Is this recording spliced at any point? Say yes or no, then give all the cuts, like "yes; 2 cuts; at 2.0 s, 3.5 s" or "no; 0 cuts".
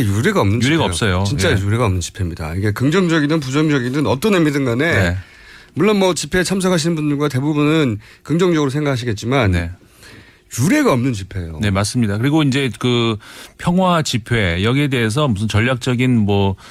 no; 0 cuts